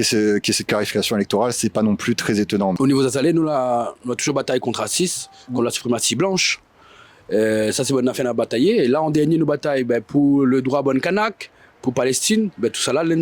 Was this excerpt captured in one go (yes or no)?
no